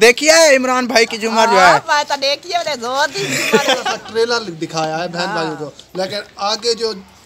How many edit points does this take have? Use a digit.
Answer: 1